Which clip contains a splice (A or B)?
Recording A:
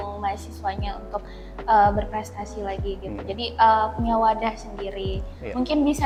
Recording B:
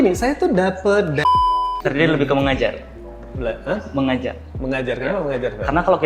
B